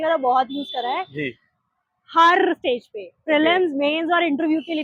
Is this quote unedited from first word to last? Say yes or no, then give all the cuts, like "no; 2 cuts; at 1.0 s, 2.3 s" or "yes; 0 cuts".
yes; 0 cuts